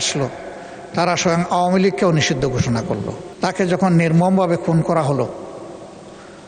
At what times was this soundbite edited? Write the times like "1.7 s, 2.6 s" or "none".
3.2 s

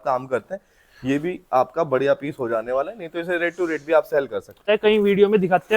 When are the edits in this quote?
4.6 s

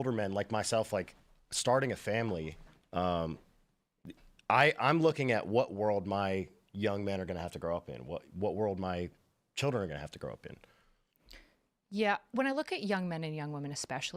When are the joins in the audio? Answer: none

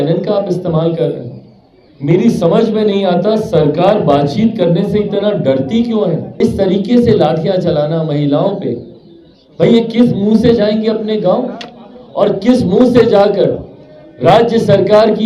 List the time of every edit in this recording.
6.3 s

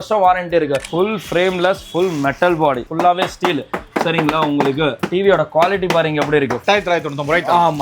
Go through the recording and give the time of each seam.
0.9 s, 2.9 s, 5.0 s, 6.6 s

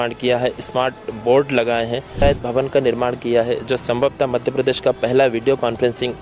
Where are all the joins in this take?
2.2 s

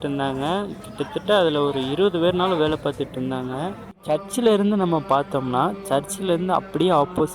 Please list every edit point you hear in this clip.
4.0 s

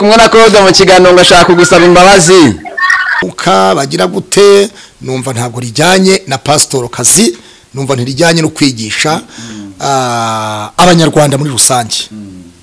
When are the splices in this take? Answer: 3.2 s

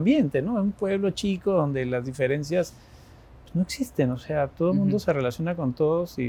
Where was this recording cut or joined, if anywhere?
none

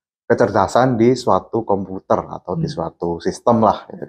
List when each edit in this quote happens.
none

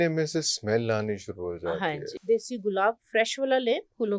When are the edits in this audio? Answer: 2.1 s

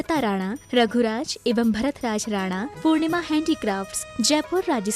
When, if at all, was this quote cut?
4.0 s

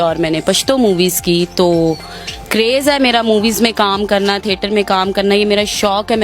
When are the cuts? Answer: none

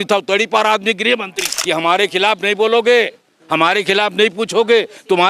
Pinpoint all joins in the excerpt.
1.5 s

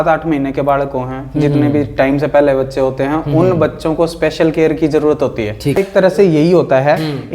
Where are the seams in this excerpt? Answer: 5.8 s

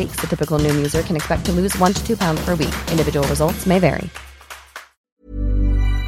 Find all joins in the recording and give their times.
5.0 s

